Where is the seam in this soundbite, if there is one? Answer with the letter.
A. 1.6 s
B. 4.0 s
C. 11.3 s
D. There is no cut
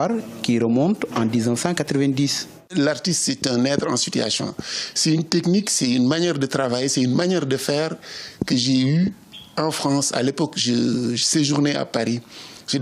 C